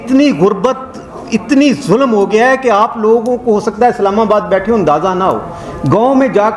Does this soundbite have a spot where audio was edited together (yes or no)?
no